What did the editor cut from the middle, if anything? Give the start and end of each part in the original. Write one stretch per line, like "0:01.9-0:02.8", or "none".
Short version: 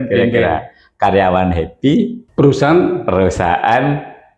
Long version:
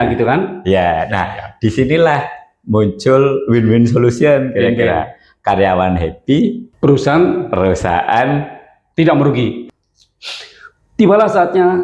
none